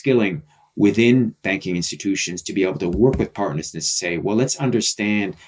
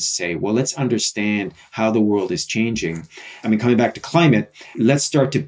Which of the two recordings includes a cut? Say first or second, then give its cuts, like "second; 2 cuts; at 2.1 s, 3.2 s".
second; 2 cuts; at 3.3 s, 4.8 s